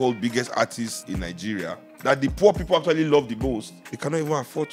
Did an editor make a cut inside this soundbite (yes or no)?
yes